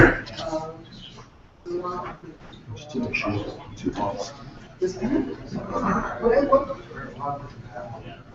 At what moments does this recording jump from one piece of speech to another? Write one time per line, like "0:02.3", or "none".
none